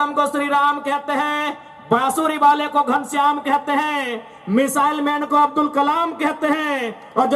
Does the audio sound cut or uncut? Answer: uncut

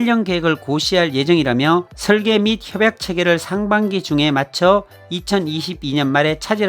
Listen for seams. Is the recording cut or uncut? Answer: uncut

